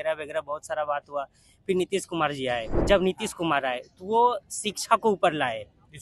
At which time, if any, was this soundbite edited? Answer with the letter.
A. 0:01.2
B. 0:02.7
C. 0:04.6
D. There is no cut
B